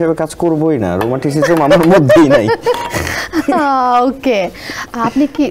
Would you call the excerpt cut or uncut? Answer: uncut